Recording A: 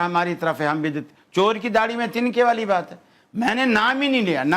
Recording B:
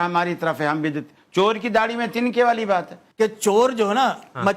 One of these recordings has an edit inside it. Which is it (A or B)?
B